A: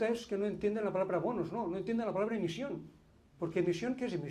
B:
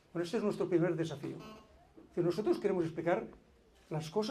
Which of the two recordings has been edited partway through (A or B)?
B